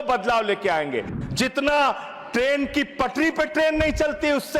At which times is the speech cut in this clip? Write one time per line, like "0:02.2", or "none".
0:01.1